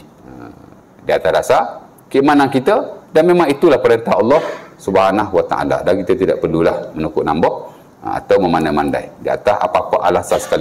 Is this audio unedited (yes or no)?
yes